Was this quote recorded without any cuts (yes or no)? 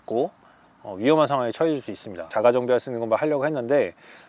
no